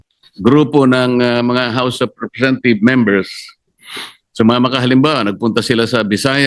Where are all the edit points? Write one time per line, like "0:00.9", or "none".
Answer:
none